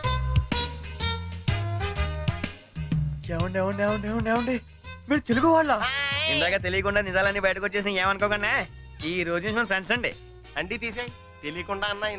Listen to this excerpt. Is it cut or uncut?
uncut